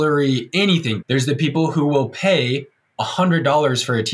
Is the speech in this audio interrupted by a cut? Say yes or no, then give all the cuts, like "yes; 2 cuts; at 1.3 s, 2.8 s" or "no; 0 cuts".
yes; 1 cut; at 1.0 s